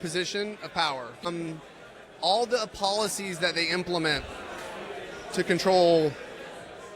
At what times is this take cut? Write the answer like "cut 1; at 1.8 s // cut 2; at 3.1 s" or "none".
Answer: cut 1; at 1.2 s